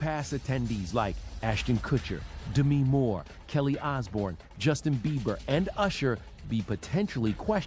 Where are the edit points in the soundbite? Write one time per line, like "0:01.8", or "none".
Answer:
none